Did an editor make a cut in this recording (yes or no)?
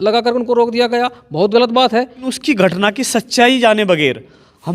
yes